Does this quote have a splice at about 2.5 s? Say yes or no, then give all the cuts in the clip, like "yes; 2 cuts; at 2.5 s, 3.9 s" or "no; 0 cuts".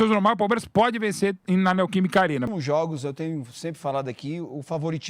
yes; 1 cut; at 2.5 s